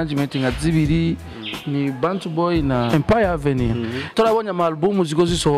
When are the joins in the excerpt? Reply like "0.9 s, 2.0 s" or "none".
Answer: 2.9 s, 4.1 s